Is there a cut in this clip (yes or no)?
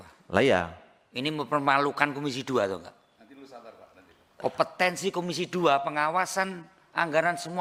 no